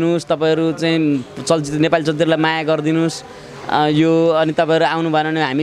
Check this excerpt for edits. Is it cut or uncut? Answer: uncut